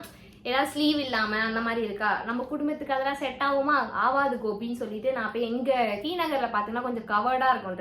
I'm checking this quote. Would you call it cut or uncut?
uncut